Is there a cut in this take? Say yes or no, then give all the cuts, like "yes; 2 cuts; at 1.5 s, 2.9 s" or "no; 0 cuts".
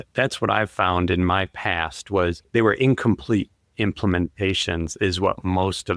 yes; 1 cut; at 2.4 s